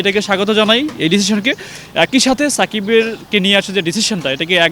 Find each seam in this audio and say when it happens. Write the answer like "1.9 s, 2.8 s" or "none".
none